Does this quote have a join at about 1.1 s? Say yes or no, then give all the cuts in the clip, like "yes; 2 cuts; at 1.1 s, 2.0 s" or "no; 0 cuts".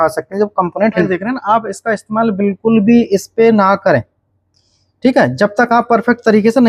yes; 1 cut; at 1.1 s